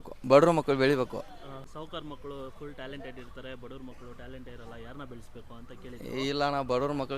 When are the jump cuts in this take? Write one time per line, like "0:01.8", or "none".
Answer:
0:01.7